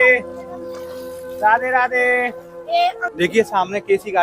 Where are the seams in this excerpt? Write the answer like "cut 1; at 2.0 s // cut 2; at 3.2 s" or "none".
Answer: cut 1; at 3.0 s